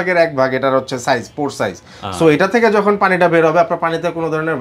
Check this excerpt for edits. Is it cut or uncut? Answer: uncut